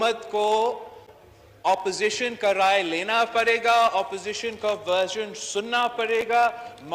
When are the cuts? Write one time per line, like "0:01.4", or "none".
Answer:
none